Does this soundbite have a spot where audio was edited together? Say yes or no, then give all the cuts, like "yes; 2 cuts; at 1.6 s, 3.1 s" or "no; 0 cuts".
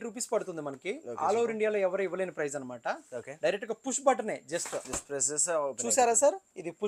no; 0 cuts